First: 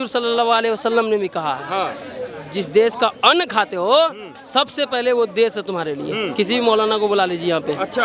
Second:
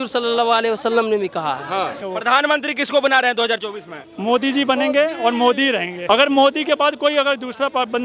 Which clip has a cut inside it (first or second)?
second